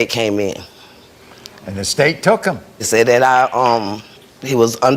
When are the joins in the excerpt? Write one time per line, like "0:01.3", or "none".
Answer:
0:02.7